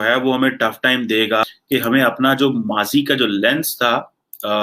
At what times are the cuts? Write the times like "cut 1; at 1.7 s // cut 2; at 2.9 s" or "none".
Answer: cut 1; at 1.4 s